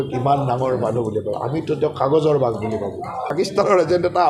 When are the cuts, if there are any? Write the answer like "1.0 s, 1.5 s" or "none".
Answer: 3.3 s